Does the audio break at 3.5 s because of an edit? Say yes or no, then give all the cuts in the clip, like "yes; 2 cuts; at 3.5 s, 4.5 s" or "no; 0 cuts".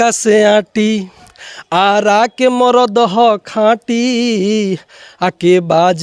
no; 0 cuts